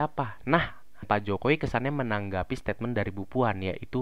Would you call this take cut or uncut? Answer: cut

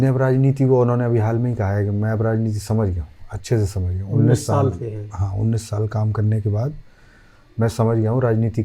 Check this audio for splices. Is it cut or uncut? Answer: uncut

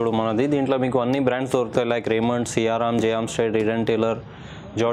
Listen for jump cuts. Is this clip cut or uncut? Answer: uncut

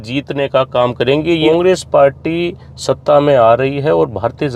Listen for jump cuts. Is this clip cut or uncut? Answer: cut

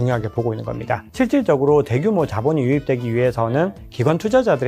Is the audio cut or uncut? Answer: cut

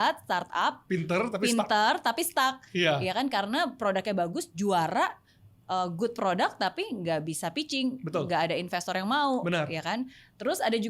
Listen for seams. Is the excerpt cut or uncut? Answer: uncut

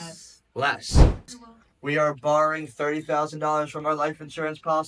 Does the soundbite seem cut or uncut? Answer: cut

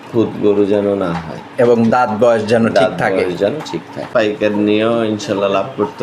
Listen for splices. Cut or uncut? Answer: cut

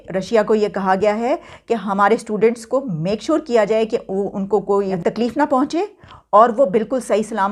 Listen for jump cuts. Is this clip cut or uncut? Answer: uncut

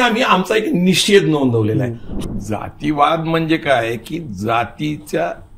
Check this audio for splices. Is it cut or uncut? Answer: cut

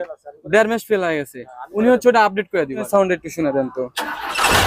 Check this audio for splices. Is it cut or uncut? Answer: cut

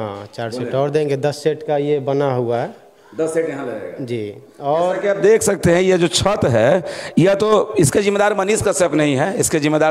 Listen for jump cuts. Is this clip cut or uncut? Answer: uncut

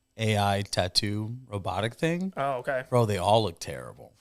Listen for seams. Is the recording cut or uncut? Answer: uncut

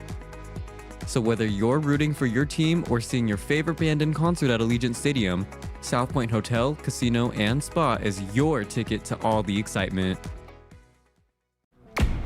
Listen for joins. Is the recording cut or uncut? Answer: cut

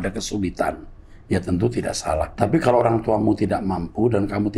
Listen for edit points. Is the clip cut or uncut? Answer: cut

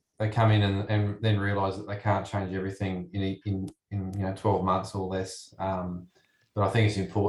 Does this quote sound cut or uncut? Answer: uncut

